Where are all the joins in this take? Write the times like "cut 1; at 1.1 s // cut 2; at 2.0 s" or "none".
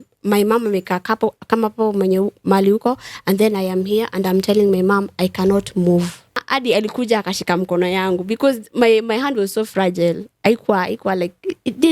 cut 1; at 6.4 s

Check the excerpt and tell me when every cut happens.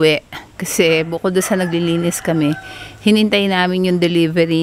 none

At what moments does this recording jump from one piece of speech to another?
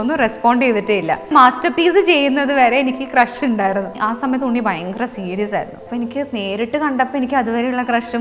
cut 1; at 1.3 s // cut 2; at 4.0 s // cut 3; at 5.8 s

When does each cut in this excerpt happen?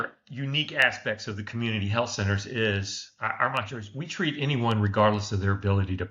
none

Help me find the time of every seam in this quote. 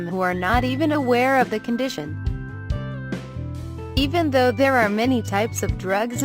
cut 1; at 3.7 s

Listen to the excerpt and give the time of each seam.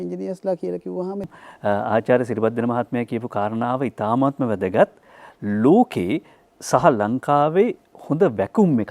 cut 1; at 1.2 s

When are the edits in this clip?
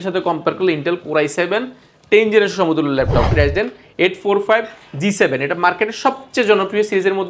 cut 1; at 3.3 s

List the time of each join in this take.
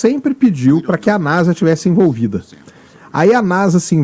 none

